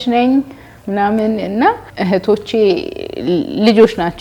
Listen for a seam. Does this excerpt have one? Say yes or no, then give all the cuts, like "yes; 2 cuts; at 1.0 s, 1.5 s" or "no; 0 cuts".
yes; 1 cut; at 1.9 s